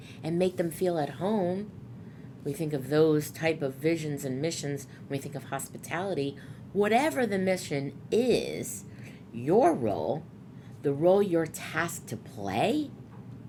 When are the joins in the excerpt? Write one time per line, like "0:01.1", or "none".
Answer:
none

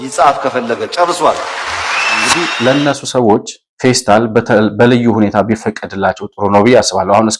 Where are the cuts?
0:02.5

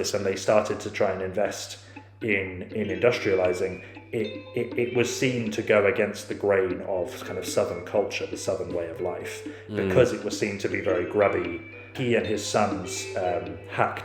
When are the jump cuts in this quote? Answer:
0:11.9

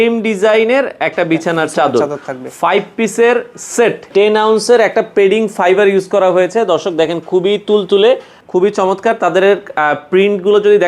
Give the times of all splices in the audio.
0:04.1
0:08.4

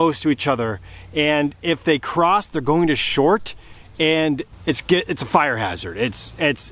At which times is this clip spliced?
0:04.5

